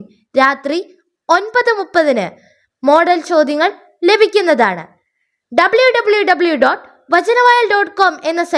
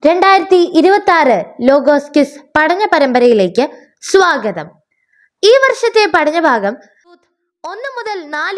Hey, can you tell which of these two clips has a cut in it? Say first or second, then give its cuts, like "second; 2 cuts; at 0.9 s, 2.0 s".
second; 1 cut; at 7.2 s